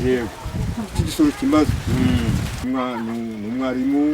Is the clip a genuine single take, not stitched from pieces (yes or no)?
no